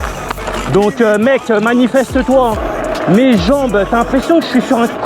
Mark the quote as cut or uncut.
cut